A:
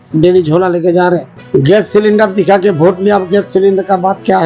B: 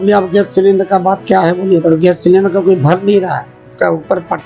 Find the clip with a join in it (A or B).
A